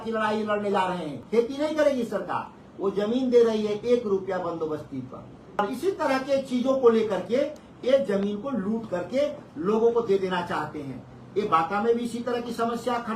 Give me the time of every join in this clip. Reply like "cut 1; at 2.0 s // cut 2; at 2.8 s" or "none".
cut 1; at 1.2 s // cut 2; at 5.6 s